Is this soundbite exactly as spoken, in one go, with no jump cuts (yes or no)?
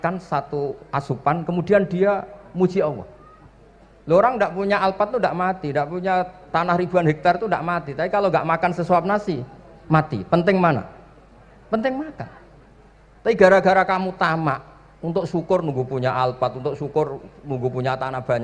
yes